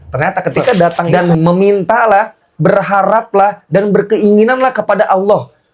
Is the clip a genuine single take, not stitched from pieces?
no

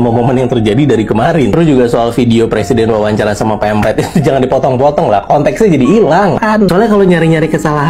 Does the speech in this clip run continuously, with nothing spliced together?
no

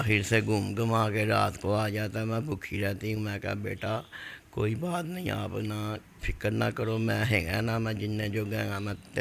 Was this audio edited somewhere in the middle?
no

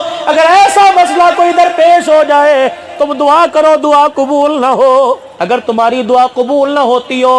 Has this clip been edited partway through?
yes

